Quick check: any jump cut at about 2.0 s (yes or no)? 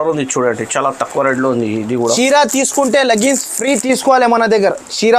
yes